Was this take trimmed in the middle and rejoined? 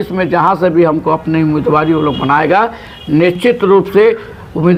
no; 0 cuts

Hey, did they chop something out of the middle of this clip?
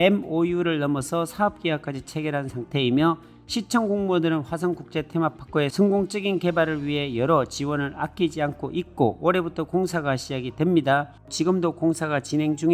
yes; 1 cut; at 11.3 s

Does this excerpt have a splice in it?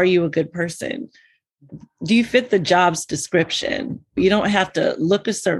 no; 0 cuts

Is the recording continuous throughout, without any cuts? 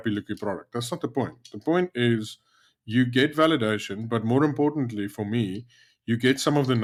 yes; 0 cuts

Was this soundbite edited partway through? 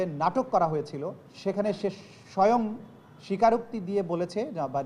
yes; 1 cut; at 1.2 s

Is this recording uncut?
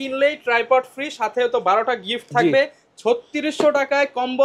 yes; 0 cuts

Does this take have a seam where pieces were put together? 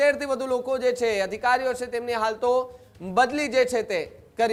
no; 0 cuts

